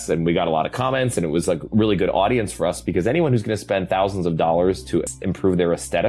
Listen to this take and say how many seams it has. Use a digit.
1